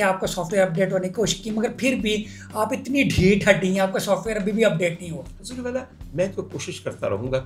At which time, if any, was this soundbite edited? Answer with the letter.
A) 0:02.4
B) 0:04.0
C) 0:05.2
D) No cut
D